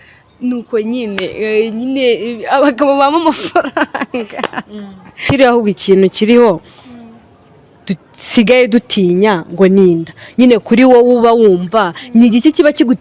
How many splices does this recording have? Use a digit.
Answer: 1